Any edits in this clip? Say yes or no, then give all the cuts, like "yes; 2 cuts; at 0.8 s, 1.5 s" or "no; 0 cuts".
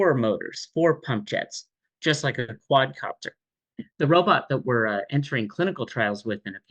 no; 0 cuts